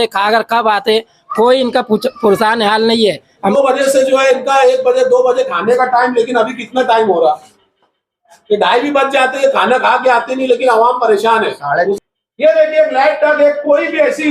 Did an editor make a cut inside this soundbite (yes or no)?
yes